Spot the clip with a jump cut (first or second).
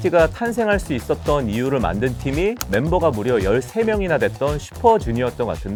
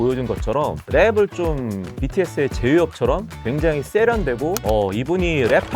second